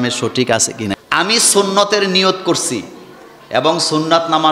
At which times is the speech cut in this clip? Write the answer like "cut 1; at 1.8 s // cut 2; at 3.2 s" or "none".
cut 1; at 1.0 s